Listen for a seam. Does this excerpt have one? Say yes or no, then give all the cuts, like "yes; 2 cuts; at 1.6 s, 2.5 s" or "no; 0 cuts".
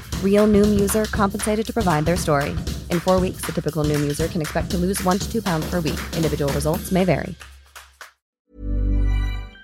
yes; 1 cut; at 8.4 s